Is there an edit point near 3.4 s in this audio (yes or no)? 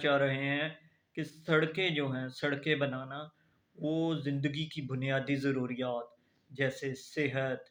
no